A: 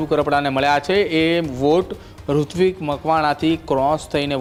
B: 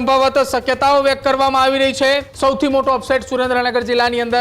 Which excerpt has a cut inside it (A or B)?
B